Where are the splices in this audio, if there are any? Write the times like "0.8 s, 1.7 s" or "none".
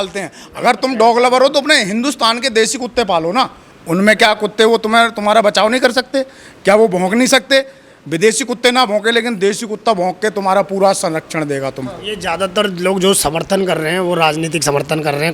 none

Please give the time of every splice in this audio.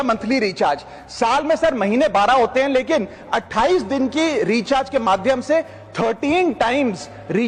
none

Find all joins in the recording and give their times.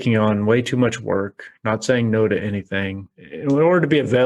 3.1 s

